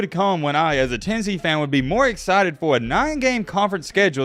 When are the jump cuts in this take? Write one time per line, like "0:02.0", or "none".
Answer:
none